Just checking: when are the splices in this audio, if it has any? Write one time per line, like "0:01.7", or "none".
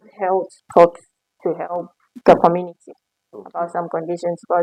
none